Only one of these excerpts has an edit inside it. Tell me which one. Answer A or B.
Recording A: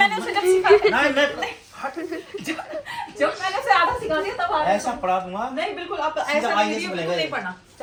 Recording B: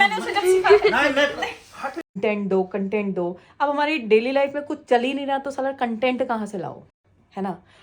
B